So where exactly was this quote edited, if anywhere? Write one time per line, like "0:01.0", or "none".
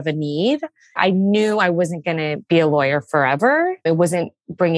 0:01.0
0:02.4
0:03.8